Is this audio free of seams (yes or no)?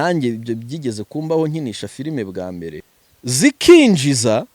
no